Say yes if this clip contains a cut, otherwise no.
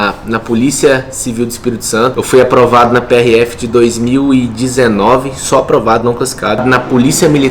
yes